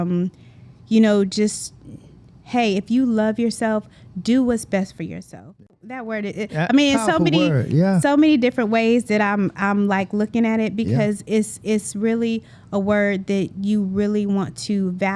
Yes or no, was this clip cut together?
yes